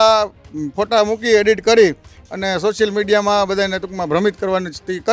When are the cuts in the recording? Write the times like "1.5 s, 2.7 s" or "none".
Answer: none